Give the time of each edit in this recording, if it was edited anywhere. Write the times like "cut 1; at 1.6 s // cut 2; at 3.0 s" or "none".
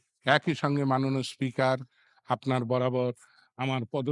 none